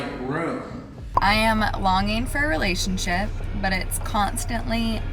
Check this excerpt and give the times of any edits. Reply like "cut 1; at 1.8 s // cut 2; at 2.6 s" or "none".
cut 1; at 1.0 s